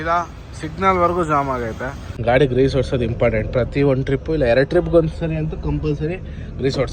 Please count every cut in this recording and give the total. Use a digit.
1